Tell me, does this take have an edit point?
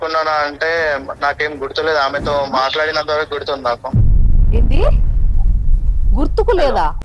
no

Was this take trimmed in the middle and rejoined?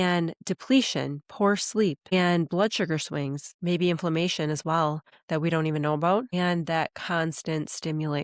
yes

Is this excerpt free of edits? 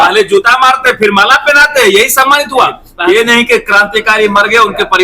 no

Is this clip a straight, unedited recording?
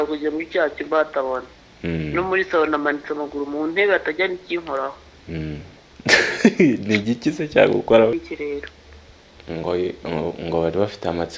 no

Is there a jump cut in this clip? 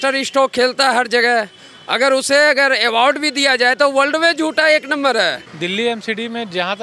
yes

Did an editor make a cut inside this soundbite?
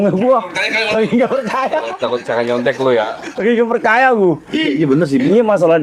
no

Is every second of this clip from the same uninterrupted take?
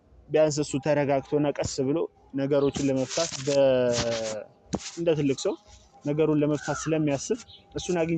yes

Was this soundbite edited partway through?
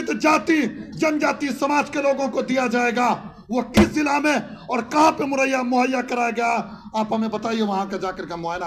no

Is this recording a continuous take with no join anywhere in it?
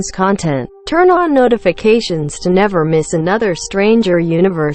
no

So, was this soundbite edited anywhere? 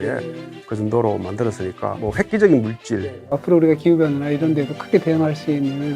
yes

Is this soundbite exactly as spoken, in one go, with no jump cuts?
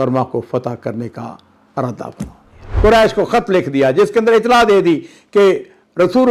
no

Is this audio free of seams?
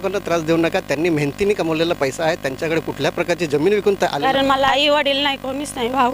no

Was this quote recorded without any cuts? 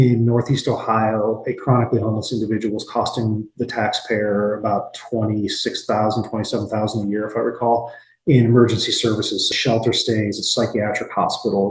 yes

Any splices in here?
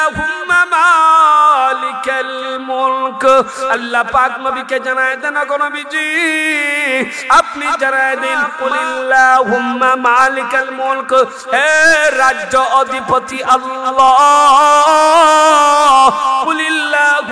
yes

